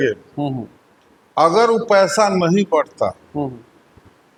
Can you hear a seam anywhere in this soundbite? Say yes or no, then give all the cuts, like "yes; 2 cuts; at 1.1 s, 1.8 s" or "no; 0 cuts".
no; 0 cuts